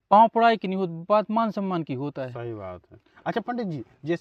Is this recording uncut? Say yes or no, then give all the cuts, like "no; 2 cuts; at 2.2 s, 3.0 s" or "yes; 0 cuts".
yes; 0 cuts